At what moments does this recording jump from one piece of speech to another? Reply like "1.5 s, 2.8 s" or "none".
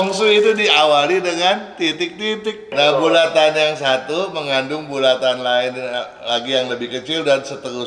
2.7 s